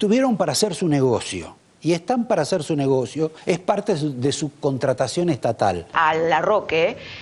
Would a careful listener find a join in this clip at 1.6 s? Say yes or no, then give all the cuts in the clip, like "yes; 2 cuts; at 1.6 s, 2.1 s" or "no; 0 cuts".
no; 0 cuts